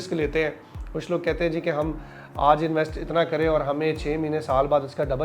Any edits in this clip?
no; 0 cuts

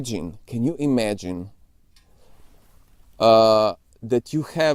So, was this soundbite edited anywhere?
no; 0 cuts

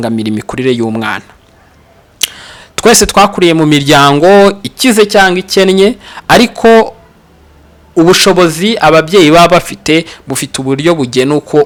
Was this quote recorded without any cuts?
yes; 0 cuts

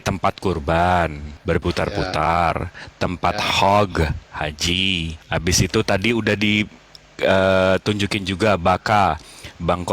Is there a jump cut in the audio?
yes; 2 cuts; at 1.3 s, 5.2 s

